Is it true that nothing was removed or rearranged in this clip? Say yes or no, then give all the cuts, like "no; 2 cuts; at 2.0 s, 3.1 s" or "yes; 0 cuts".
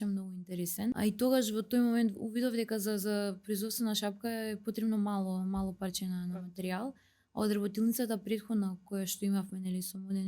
no; 1 cut; at 1.0 s